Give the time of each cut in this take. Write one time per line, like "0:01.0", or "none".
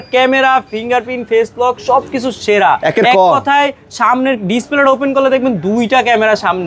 none